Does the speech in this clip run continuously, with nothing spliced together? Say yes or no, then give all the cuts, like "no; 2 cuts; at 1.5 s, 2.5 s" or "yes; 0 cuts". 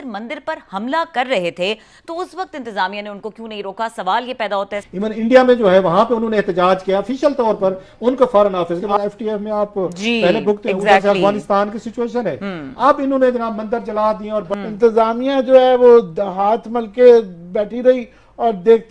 no; 3 cuts; at 4.8 s, 8.9 s, 14.5 s